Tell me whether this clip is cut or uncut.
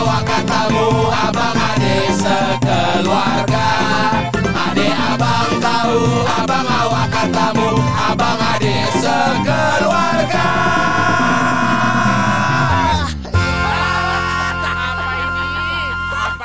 uncut